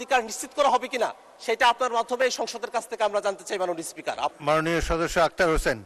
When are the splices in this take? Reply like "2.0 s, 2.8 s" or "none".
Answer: 4.3 s